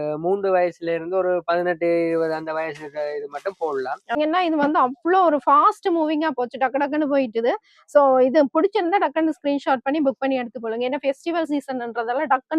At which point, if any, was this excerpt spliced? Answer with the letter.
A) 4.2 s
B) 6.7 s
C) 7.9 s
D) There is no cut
A